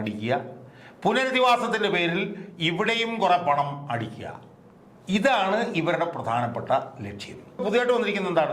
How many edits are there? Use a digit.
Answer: 1